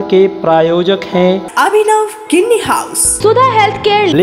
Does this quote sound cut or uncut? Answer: cut